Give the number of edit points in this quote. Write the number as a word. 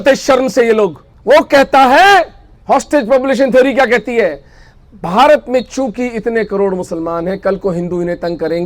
one